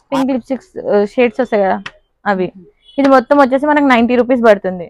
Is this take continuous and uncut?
yes; 0 cuts

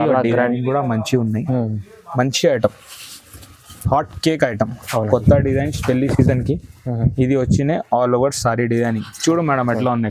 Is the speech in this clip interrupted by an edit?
no; 0 cuts

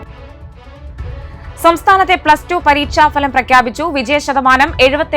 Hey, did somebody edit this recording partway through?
yes; 1 cut; at 1.3 s

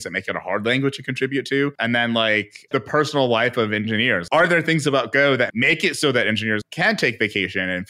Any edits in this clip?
yes; 5 cuts; at 1.8 s, 2.7 s, 4.2 s, 5.5 s, 6.7 s

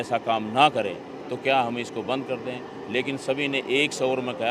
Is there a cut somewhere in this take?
no; 0 cuts

